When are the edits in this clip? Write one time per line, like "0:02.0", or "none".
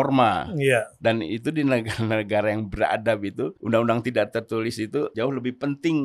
0:03.6
0:05.1